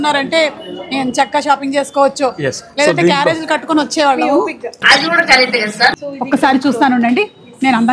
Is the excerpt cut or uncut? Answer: cut